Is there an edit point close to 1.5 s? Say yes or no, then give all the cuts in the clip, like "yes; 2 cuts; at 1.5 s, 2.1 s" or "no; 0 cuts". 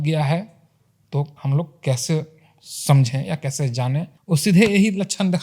no; 1 cut; at 4.1 s